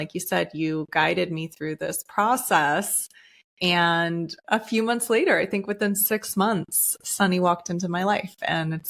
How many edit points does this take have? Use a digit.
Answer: 1